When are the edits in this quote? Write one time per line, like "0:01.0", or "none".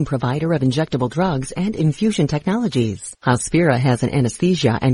0:03.1